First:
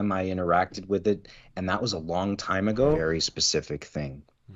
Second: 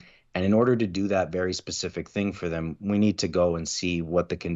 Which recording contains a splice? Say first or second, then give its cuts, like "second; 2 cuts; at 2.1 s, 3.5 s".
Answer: first; 1 cut; at 3.0 s